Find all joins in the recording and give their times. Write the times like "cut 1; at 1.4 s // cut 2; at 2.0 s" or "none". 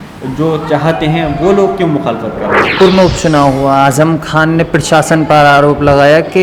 cut 1; at 2.8 s